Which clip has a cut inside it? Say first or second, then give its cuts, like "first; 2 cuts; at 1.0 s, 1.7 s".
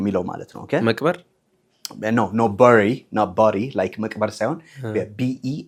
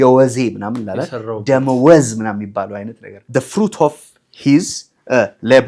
second; 1 cut; at 3.2 s